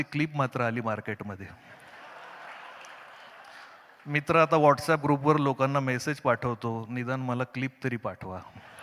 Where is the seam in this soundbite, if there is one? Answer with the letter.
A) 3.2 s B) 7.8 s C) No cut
C